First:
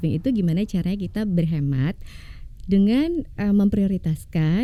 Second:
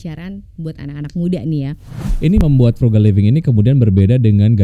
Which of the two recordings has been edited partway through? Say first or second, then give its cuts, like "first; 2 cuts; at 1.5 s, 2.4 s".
second; 1 cut; at 2.3 s